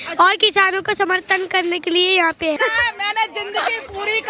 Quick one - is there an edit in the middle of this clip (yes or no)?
yes